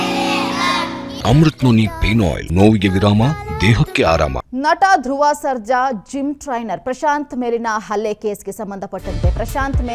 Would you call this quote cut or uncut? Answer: cut